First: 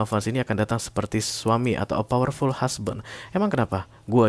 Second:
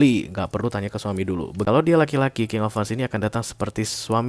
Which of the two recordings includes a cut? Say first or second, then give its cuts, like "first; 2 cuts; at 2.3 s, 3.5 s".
second; 1 cut; at 1.6 s